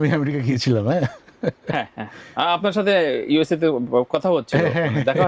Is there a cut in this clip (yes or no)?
no